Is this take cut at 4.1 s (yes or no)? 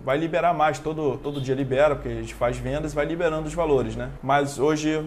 yes